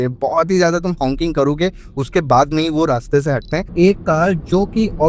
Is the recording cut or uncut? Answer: cut